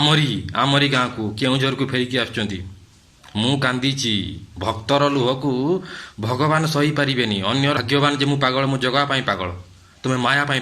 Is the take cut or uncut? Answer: cut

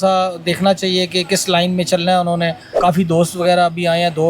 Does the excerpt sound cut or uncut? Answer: cut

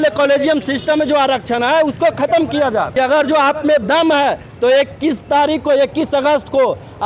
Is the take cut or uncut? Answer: cut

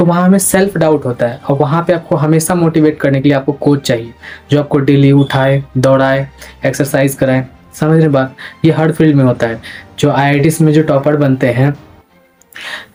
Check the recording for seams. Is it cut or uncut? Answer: uncut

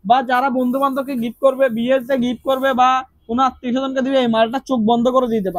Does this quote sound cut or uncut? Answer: uncut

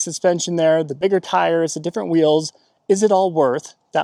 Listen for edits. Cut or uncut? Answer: uncut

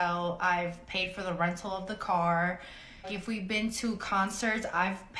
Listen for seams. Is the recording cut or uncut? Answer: cut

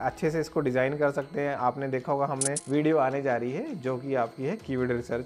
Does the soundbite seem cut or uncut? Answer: cut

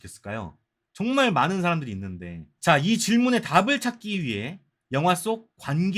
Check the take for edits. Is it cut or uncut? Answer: uncut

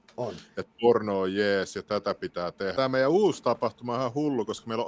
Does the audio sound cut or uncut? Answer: cut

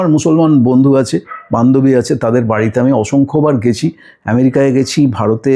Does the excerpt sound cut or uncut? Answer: uncut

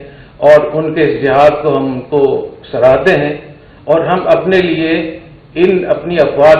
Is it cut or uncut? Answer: uncut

